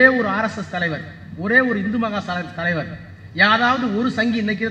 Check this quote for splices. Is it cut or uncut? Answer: uncut